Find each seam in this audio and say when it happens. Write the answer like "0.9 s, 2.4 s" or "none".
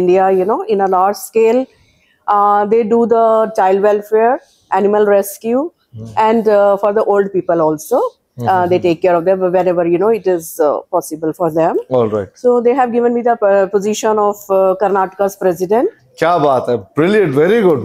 none